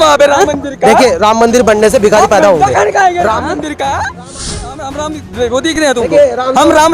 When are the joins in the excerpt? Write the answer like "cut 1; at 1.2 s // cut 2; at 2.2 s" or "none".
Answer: cut 1; at 4.6 s